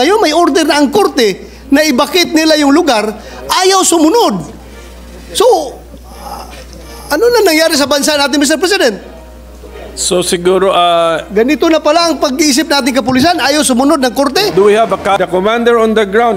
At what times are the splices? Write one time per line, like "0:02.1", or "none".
0:15.2